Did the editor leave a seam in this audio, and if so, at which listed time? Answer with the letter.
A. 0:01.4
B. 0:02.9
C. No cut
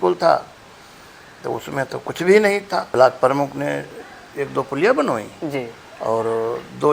B